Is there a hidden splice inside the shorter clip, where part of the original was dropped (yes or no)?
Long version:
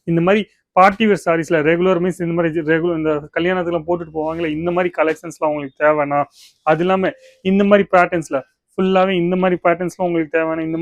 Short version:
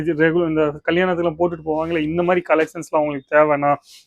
no